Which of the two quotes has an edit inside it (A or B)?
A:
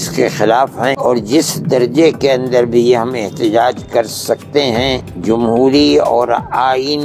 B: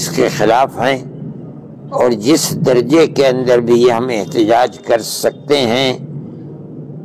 A